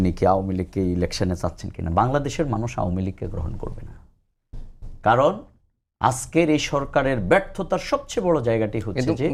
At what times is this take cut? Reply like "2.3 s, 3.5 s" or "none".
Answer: none